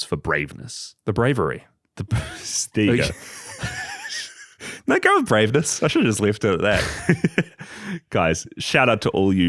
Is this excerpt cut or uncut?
uncut